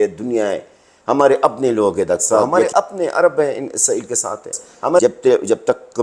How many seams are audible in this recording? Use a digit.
2